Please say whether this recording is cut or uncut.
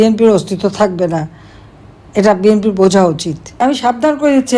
cut